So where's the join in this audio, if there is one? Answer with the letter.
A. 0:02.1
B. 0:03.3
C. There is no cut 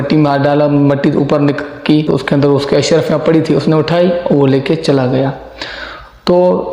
A